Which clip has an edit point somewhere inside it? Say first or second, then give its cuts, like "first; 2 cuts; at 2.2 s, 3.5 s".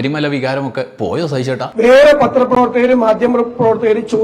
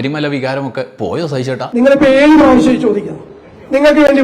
second; 1 cut; at 1.6 s